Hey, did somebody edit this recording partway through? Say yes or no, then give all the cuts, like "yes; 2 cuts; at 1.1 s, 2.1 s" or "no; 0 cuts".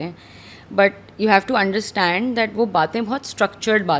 no; 0 cuts